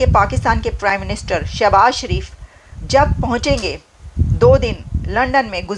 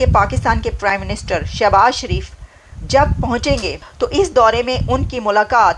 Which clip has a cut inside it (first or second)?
second